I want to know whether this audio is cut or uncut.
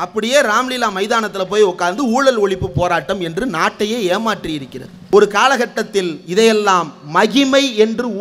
cut